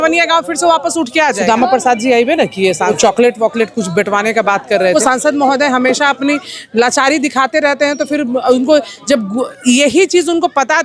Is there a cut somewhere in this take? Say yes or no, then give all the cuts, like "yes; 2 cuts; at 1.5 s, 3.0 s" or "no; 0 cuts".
yes; 3 cuts; at 1.4 s, 2.9 s, 4.9 s